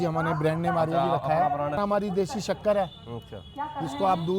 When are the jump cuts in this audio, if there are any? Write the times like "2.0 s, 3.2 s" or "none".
1.8 s